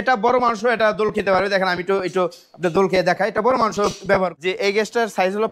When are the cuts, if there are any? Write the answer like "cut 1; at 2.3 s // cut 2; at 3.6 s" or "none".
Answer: cut 1; at 4.3 s